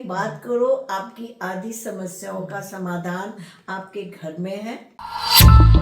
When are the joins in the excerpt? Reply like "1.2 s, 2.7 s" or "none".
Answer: 4.9 s